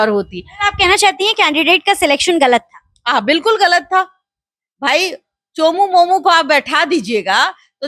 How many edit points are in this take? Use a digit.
0